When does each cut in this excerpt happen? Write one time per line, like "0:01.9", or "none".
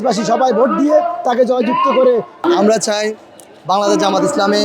0:02.4